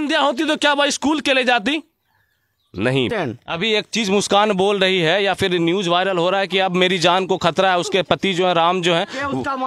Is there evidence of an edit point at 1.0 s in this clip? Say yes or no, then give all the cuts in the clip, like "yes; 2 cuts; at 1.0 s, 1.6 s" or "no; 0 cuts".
no; 1 cut; at 3.1 s